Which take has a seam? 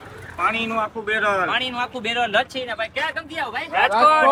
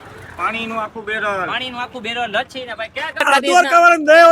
second; 1 cut; at 3.3 s

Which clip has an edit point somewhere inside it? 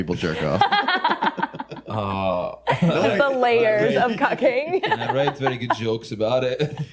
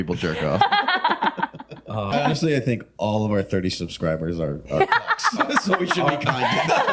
second; 1 cut; at 2.3 s

